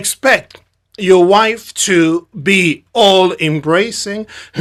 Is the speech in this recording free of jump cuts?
yes; 0 cuts

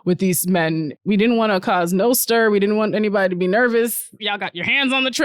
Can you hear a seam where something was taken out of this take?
yes; 1 cut; at 1.0 s

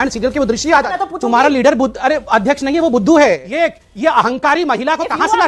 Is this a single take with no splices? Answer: no; 2 cuts; at 1.0 s, 3.5 s

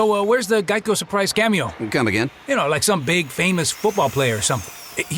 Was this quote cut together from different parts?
no; 0 cuts

